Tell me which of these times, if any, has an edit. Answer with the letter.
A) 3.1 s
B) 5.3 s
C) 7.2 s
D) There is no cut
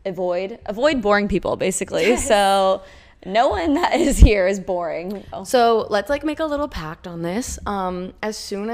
B